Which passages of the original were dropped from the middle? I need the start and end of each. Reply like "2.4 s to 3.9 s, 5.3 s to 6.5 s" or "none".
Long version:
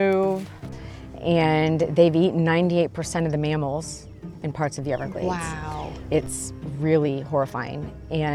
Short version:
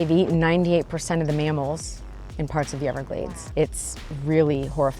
5.3 s to 5.8 s